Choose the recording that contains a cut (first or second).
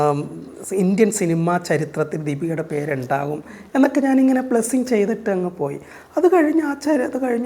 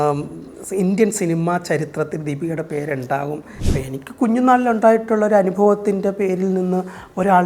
second